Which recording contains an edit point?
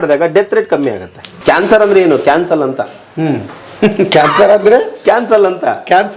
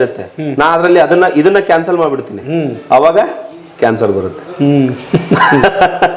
first; 1 cut; at 1.3 s

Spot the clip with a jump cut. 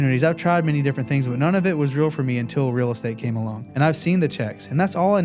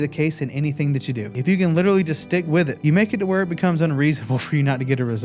second; 2 cuts; at 1.3 s, 2.8 s

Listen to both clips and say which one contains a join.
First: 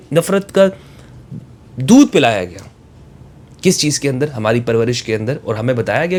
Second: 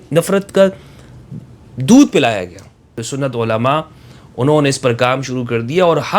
second; 1 cut; at 3.0 s

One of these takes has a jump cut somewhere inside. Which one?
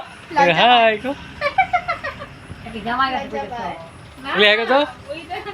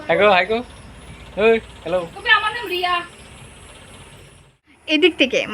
second; 1 cut; at 4.5 s

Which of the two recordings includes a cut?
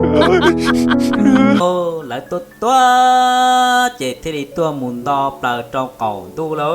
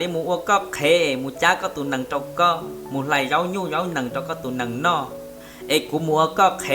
first; 1 cut; at 1.6 s

